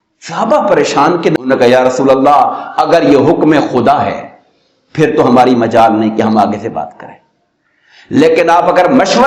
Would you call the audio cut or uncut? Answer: cut